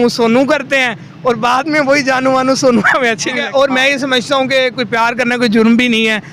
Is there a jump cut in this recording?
yes; 1 cut; at 3.3 s

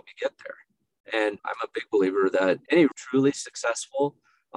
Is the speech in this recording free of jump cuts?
no; 1 cut; at 2.7 s

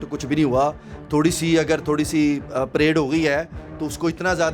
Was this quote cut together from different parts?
no; 0 cuts

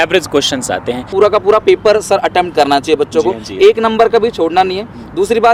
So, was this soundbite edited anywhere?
yes; 1 cut; at 1.1 s

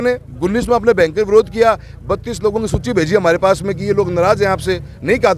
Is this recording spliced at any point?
no; 0 cuts

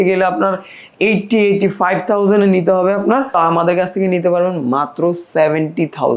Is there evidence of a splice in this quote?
yes; 1 cut; at 3.4 s

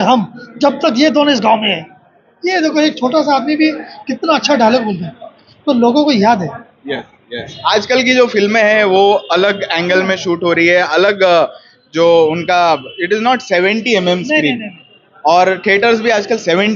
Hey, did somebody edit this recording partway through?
no; 0 cuts

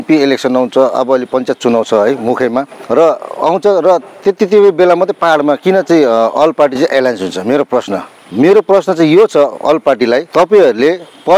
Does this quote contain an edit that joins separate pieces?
yes; 3 cuts; at 2.8 s, 8.2 s, 10.3 s

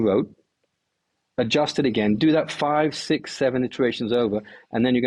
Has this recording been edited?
no; 0 cuts

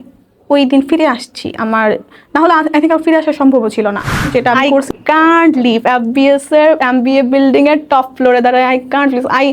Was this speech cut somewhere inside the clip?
yes; 1 cut; at 4.9 s

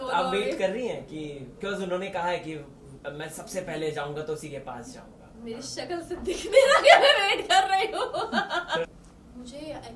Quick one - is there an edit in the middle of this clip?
yes; 1 cut; at 8.9 s

